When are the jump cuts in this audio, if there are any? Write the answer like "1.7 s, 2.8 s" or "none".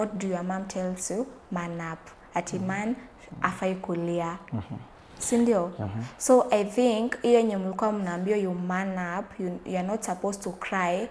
none